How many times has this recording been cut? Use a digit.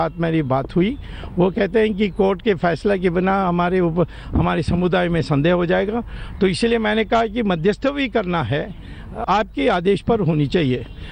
1